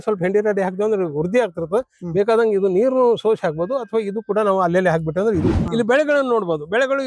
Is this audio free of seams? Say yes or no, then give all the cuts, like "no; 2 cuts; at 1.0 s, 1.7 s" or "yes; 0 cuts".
no; 1 cut; at 5.5 s